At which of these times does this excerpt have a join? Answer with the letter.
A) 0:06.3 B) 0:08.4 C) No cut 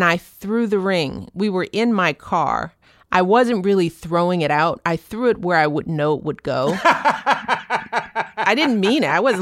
B